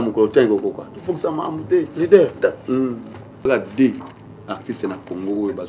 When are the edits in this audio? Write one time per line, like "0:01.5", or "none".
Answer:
0:03.5

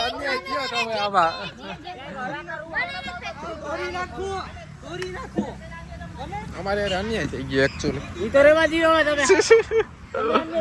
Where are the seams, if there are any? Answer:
none

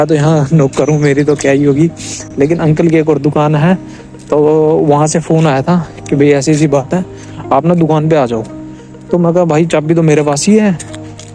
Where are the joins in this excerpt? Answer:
none

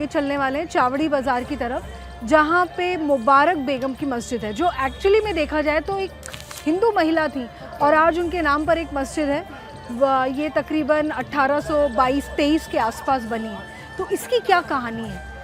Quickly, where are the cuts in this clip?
none

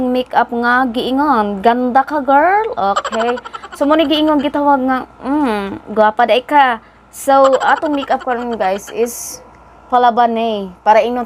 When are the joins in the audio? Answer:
none

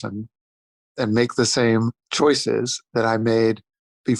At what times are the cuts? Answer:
0:02.0

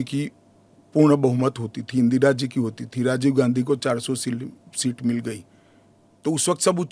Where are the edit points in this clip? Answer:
none

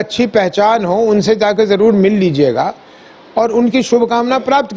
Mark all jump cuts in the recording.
none

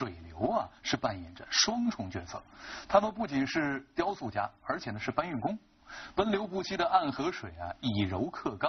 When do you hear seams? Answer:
0:02.6

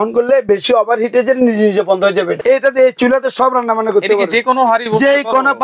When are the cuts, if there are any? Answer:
0:02.4

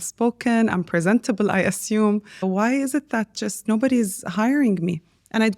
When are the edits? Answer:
0:02.4
0:03.6

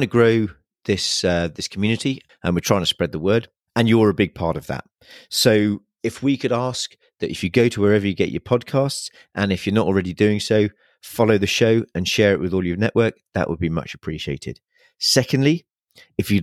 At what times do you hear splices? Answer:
0:02.3

